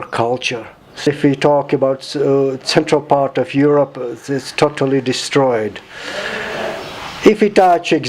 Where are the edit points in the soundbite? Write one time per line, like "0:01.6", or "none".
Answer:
0:01.1